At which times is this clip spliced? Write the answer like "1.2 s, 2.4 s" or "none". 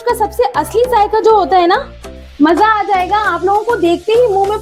2.0 s